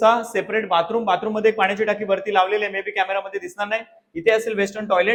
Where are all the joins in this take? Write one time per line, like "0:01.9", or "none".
none